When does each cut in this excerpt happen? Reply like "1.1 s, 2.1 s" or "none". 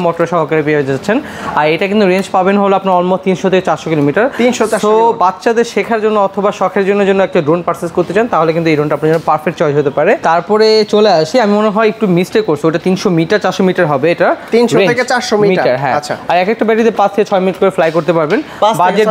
none